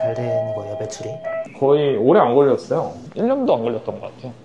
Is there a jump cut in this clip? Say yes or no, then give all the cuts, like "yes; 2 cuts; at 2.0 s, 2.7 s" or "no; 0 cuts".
no; 0 cuts